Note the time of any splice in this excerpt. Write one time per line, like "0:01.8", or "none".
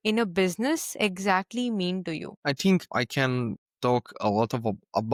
none